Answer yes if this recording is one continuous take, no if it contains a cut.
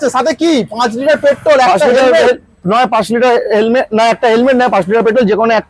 yes